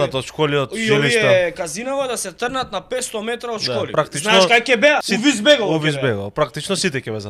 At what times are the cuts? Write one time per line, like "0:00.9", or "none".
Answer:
0:03.9
0:05.1